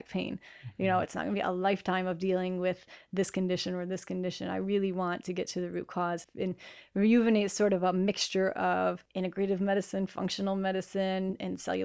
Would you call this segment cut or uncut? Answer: cut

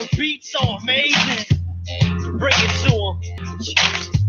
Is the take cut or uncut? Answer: cut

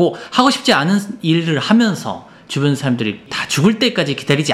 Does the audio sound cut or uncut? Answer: cut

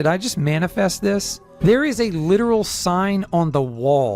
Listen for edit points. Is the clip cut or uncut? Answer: cut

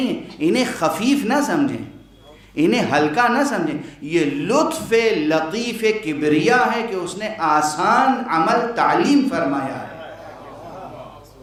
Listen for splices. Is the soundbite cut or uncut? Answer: uncut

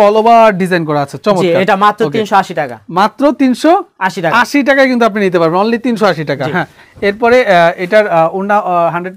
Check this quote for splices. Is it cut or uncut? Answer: uncut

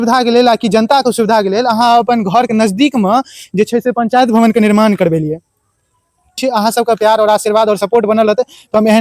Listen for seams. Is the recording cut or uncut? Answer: cut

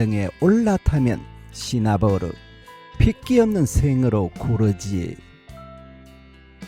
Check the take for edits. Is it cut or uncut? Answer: cut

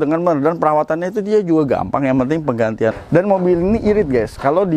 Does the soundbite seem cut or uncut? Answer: cut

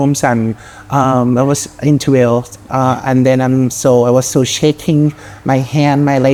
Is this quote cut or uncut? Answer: uncut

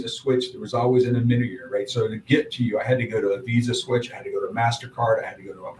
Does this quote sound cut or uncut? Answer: uncut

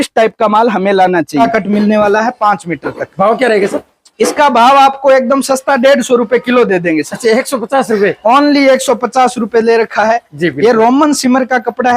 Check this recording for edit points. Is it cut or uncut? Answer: cut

